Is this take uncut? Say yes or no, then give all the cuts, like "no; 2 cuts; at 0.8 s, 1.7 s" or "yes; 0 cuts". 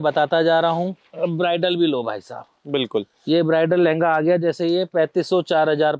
no; 1 cut; at 1.0 s